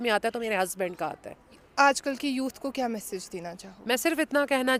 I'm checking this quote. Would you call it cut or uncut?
uncut